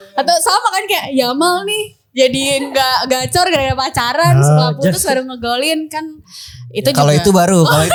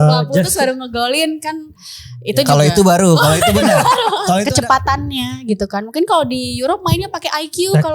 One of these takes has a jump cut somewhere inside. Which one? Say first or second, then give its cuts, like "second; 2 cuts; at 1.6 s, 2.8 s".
second; 1 cut; at 4.5 s